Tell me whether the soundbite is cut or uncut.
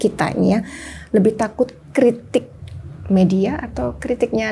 uncut